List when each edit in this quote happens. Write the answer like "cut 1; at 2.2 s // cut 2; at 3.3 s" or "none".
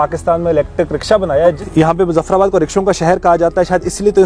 cut 1; at 1.6 s